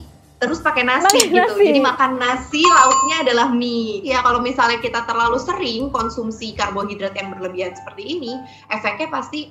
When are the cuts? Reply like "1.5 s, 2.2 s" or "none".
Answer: 4.0 s